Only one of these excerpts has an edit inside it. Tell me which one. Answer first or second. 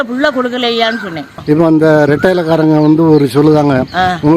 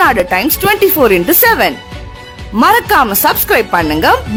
first